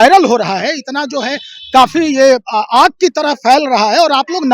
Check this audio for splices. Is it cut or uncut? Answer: uncut